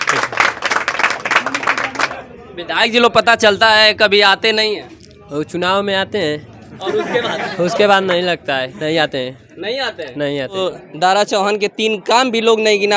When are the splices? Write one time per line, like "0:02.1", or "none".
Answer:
0:02.2
0:10.6